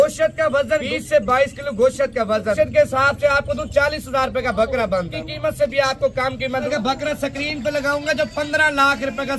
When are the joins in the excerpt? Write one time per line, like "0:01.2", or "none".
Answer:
0:00.9
0:02.5
0:05.2
0:06.7